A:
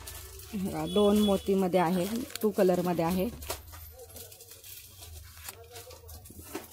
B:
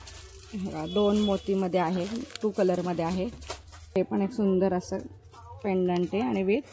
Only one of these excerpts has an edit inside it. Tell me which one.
B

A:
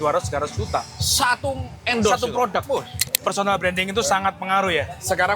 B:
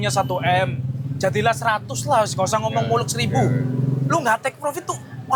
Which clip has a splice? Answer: A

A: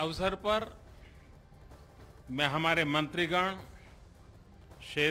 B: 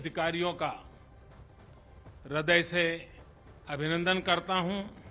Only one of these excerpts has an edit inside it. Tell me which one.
B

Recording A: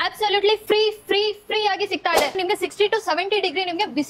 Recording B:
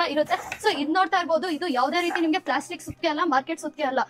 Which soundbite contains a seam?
A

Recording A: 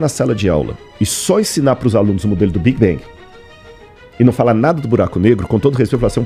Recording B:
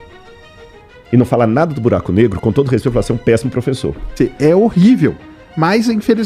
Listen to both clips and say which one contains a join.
B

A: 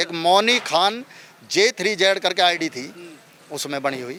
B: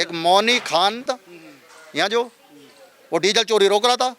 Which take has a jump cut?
B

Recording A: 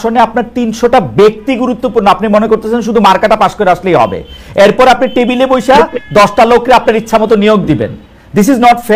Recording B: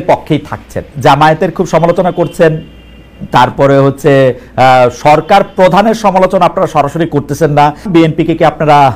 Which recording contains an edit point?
B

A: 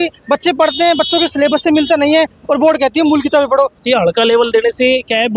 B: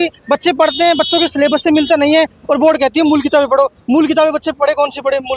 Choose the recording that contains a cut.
A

